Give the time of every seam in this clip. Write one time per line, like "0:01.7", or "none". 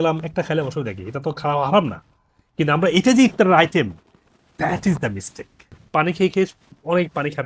0:05.7